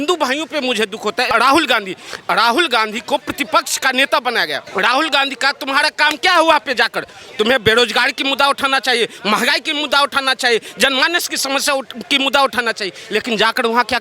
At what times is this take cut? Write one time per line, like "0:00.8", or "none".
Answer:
0:01.3
0:04.6